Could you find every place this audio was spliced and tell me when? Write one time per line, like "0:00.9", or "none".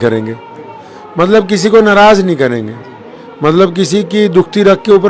none